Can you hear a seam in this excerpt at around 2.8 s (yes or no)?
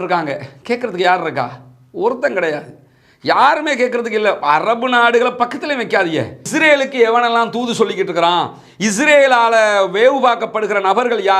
no